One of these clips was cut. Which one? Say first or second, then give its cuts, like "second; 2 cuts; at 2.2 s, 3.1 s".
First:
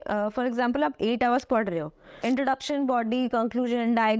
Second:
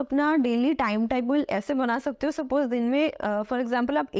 first; 1 cut; at 2.0 s